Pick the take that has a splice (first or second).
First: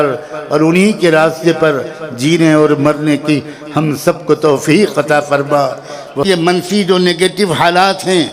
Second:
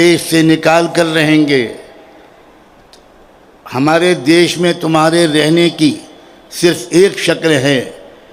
first